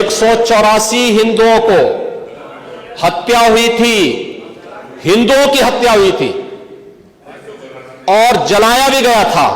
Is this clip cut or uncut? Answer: uncut